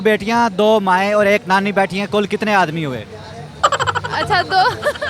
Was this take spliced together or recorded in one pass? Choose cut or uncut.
uncut